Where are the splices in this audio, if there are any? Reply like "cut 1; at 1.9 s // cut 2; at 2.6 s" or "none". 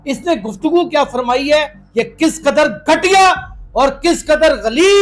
cut 1; at 1.8 s